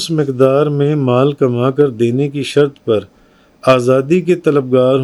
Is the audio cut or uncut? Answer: uncut